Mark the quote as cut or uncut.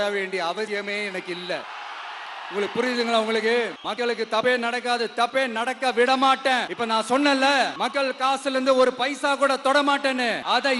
uncut